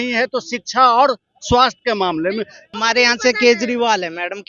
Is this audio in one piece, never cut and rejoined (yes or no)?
no